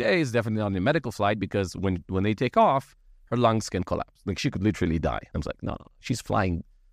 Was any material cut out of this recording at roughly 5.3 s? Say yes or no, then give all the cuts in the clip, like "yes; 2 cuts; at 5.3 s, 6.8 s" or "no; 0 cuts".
yes; 1 cut; at 5.3 s